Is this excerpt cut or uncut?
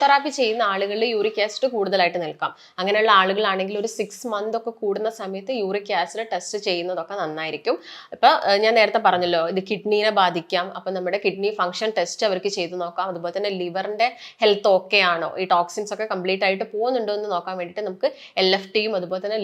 uncut